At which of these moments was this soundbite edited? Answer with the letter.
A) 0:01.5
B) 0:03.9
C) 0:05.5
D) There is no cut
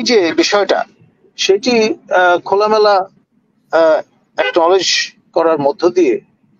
D